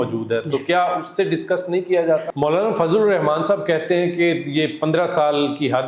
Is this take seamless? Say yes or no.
no